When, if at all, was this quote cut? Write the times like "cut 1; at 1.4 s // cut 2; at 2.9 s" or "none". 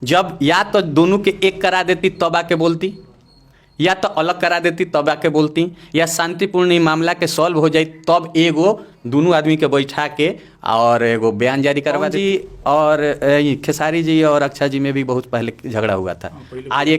cut 1; at 12.1 s